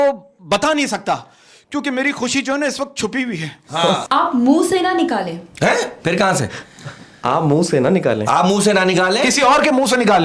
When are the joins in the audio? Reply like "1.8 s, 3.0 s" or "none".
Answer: 4.0 s